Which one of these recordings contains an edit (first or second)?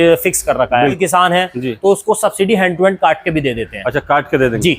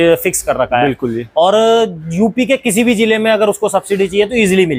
first